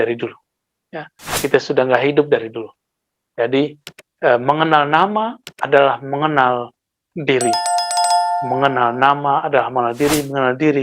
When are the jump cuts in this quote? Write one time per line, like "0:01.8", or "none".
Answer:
0:07.5
0:08.5

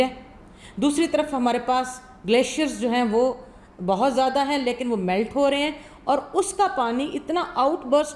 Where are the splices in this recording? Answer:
none

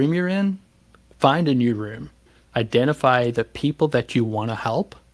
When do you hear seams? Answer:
0:02.3

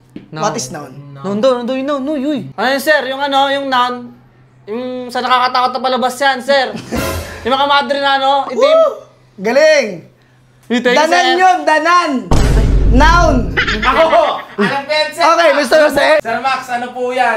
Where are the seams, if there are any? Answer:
0:02.5
0:16.2

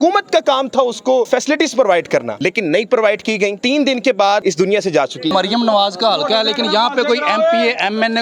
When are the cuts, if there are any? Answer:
0:01.3
0:02.3
0:03.6
0:05.3

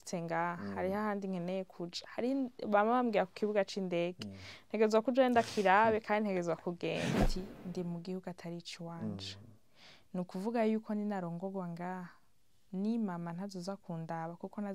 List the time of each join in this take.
0:07.3

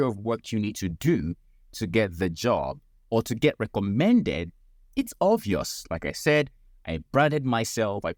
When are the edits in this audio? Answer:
none

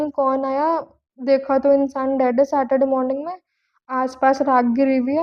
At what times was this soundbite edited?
none

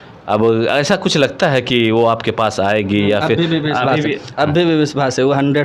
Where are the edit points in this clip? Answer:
none

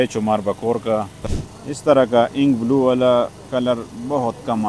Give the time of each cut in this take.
0:01.2

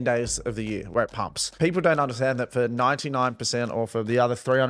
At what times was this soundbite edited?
0:01.4

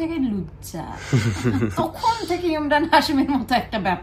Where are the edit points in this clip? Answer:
none

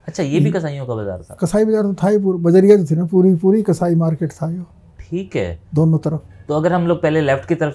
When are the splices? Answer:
none

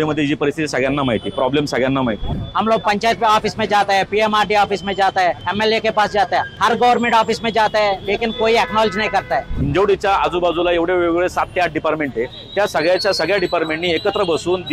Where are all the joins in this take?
0:02.3
0:05.4
0:06.5
0:09.6

